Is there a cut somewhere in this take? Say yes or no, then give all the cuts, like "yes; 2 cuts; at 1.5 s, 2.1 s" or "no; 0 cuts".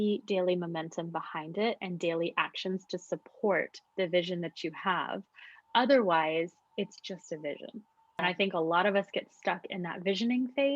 yes; 1 cut; at 8.2 s